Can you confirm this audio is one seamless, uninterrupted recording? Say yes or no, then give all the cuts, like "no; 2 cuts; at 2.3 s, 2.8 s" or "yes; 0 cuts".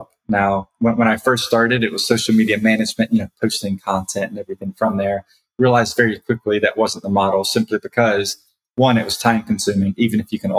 yes; 0 cuts